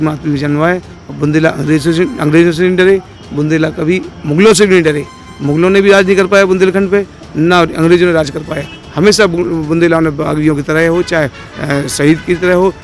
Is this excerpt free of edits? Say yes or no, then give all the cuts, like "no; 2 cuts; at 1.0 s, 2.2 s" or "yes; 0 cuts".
yes; 0 cuts